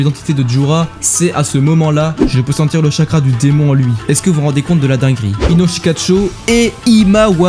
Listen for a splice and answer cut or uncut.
cut